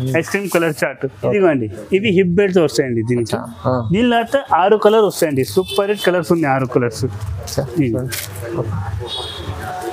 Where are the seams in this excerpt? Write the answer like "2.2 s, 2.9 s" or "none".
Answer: 1.3 s